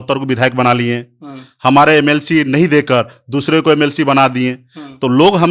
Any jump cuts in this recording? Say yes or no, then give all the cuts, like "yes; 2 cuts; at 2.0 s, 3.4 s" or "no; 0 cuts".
no; 0 cuts